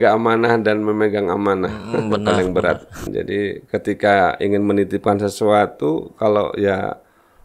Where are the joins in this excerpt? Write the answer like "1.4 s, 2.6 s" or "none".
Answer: 3.1 s